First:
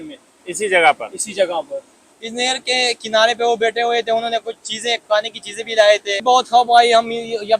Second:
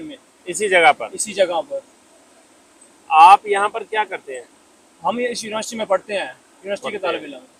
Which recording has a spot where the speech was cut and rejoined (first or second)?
first